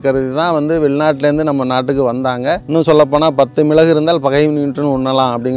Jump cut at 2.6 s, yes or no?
yes